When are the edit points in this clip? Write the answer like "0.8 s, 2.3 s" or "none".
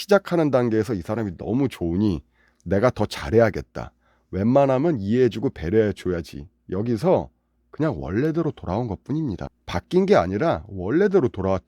9.5 s